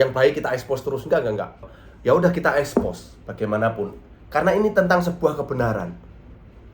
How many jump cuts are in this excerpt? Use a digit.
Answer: 1